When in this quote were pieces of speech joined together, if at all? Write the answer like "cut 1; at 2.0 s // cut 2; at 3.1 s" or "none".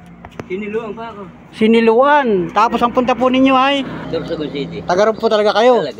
cut 1; at 4.0 s